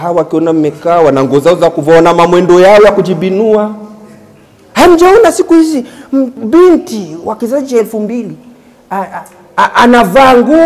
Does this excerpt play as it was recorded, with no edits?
yes; 0 cuts

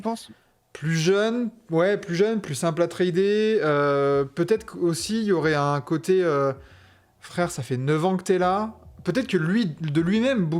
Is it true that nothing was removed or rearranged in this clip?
yes; 0 cuts

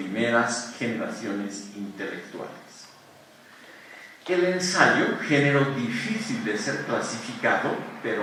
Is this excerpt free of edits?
yes; 0 cuts

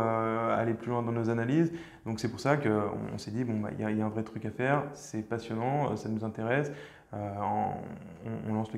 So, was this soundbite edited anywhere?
no; 0 cuts

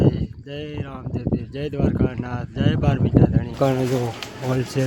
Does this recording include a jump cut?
yes; 1 cut; at 3.6 s

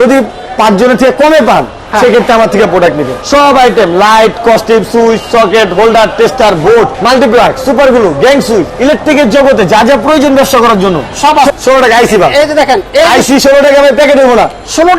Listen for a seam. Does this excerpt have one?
yes; 4 cuts; at 3.1 s, 7.0 s, 8.7 s, 11.5 s

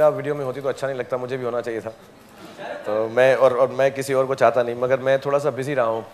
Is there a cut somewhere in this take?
no; 0 cuts

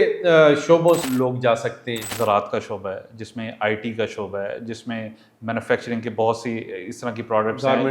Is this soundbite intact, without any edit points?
no; 2 cuts; at 1.0 s, 2.1 s

